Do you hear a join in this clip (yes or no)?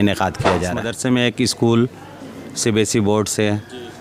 yes